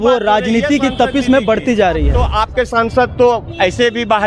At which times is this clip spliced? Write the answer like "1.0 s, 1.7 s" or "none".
2.2 s